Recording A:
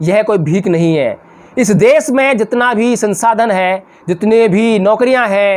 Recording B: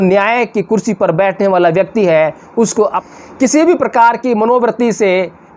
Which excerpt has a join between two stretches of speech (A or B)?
B